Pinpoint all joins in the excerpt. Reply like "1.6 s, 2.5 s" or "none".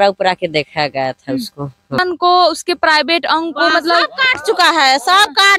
2.0 s